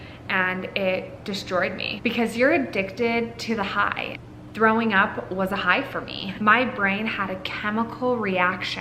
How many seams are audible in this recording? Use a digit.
1